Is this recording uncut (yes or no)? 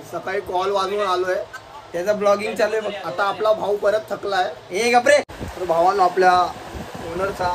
no